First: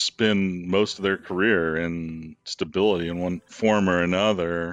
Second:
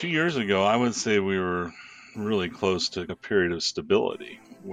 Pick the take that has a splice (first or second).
first